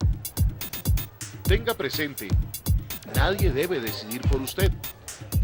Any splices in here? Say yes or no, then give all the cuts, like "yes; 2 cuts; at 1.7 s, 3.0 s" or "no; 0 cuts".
no; 0 cuts